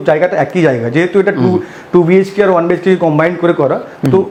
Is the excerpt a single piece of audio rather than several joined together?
yes; 0 cuts

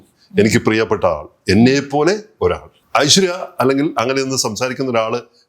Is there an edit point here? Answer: yes; 1 cut; at 2.7 s

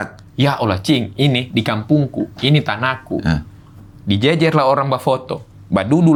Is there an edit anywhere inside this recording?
no; 0 cuts

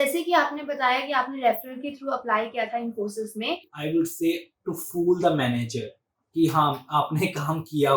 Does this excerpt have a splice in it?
yes; 1 cut; at 3.7 s

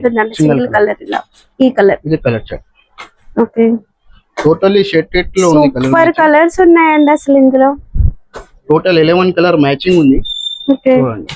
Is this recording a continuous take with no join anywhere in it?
yes; 0 cuts

